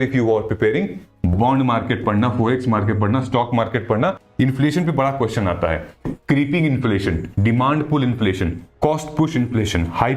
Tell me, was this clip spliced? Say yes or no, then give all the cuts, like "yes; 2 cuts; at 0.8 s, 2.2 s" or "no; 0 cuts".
yes; 1 cut; at 4.2 s